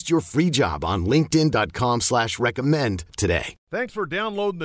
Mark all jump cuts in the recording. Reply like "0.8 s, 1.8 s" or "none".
3.5 s